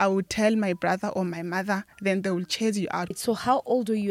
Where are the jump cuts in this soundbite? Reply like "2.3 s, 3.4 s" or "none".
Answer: 3.2 s